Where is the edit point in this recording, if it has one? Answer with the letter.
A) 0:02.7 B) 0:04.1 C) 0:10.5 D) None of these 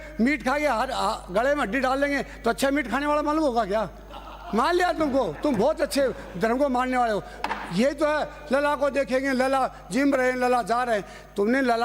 D